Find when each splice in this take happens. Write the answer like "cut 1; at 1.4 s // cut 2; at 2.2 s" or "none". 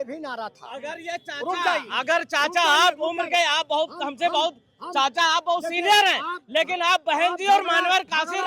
none